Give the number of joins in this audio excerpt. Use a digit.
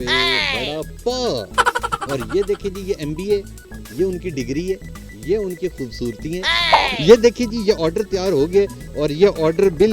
1